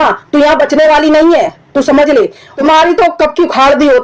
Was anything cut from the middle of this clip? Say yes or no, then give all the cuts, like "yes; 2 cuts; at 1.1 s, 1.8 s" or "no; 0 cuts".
yes; 1 cut; at 2.5 s